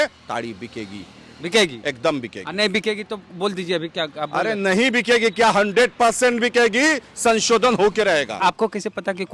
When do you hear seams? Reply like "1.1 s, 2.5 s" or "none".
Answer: 8.3 s